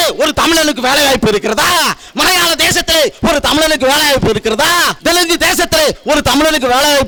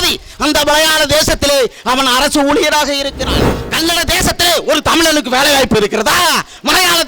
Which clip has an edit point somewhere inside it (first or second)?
second